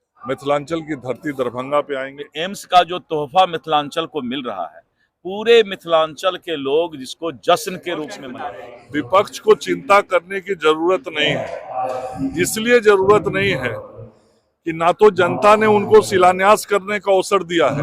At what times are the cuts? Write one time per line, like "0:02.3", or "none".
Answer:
0:02.2
0:08.2

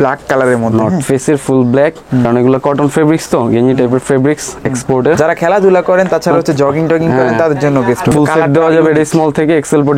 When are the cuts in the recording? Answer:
0:02.2
0:05.2
0:08.1

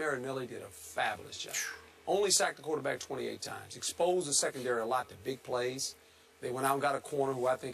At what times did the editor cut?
none

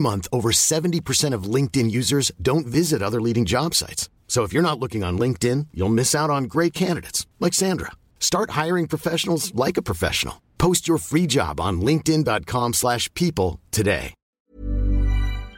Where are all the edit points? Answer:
0:14.2

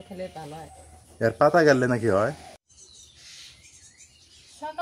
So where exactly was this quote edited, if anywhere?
0:02.5

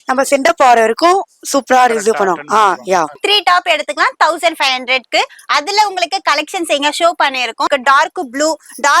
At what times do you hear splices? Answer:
0:03.2
0:07.7

